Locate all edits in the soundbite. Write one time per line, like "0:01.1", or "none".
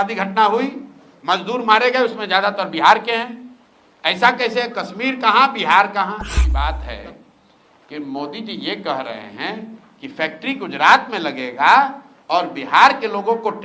0:06.4